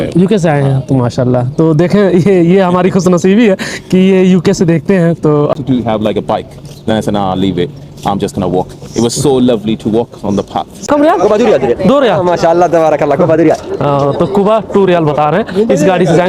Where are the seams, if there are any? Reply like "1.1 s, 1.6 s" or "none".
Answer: 5.5 s, 10.9 s